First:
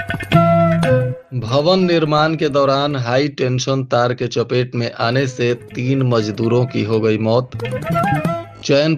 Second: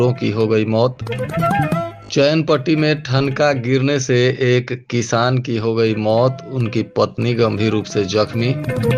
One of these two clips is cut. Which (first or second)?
first